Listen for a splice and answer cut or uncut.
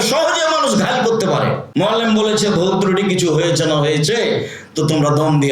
cut